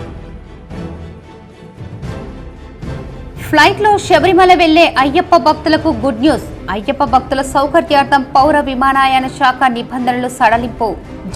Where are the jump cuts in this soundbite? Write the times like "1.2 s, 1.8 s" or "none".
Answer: 3.3 s